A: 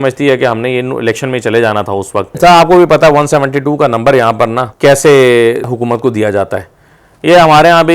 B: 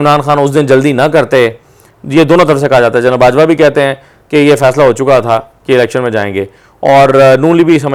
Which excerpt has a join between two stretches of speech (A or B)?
A